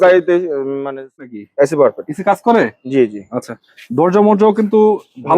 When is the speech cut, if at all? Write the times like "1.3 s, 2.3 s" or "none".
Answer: 1.3 s